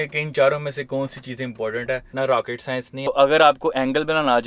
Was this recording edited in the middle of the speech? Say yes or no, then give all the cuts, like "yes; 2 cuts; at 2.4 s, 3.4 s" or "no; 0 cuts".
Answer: yes; 1 cut; at 2.5 s